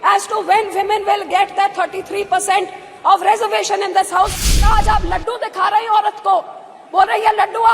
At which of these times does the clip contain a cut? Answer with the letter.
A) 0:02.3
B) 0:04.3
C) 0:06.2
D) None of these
B